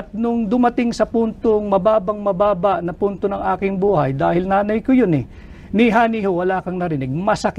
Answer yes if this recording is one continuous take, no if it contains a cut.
yes